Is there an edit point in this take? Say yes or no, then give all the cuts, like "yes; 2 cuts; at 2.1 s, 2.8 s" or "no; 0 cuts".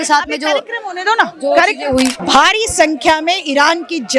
yes; 1 cut; at 2.2 s